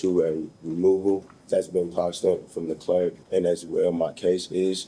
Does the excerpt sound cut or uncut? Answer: cut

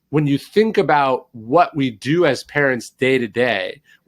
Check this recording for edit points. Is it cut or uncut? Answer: uncut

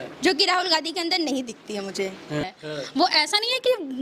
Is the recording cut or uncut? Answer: cut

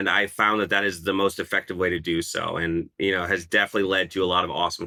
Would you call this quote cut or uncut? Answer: uncut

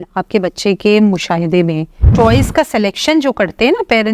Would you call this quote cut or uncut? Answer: cut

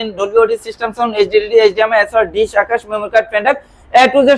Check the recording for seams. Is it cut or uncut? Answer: uncut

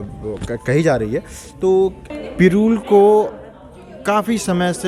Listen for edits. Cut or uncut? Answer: cut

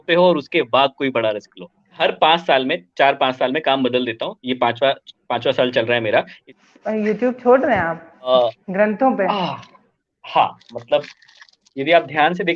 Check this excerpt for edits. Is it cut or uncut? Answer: cut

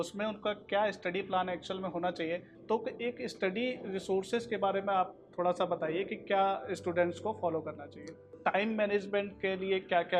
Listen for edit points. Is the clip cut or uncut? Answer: cut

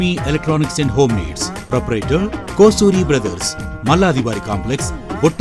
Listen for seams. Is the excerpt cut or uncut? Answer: uncut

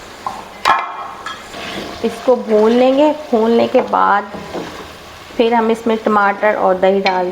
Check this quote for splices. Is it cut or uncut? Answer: cut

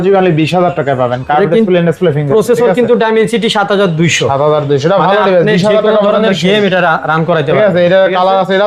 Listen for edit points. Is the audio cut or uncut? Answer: uncut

